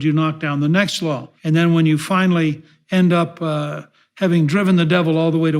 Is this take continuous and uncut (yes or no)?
no